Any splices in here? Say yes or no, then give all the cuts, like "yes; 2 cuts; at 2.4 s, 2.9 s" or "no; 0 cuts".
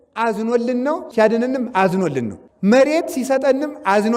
yes; 2 cuts; at 1.1 s, 2.4 s